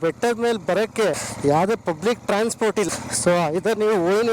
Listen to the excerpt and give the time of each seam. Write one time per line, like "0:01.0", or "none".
0:01.1
0:02.9